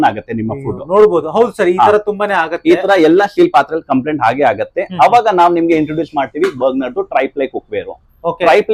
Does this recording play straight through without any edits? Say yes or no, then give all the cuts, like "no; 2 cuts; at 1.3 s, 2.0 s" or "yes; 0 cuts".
yes; 0 cuts